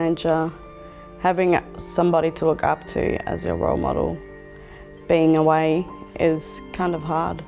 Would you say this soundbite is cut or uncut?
uncut